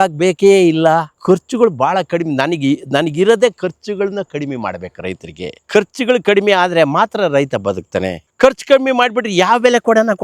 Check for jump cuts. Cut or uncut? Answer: cut